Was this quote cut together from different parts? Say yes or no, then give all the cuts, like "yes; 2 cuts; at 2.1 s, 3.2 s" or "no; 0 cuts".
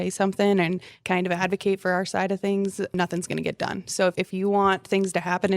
yes; 2 cuts; at 2.9 s, 4.1 s